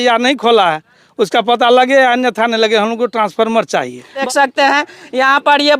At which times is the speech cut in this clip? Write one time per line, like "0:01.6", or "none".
0:04.2